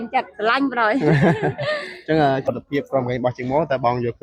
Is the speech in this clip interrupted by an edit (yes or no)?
yes